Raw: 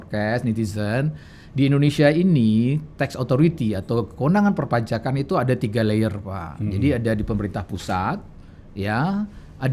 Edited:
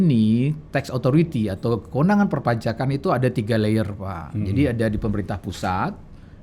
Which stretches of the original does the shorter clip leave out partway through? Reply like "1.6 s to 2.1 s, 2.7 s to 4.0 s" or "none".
none